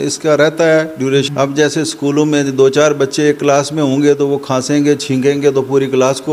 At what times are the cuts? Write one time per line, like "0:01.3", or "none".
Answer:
0:01.3